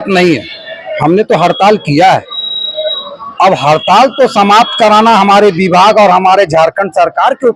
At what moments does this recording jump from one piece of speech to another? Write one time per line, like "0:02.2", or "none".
none